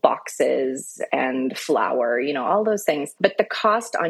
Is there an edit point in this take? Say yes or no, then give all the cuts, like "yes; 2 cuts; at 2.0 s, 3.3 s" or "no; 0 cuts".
yes; 1 cut; at 3.1 s